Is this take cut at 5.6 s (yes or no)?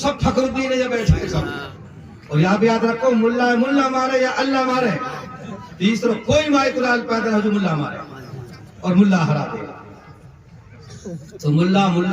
no